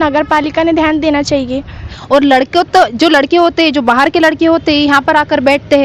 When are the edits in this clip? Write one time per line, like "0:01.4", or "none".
0:02.0